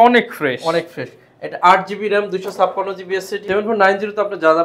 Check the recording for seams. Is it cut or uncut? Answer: cut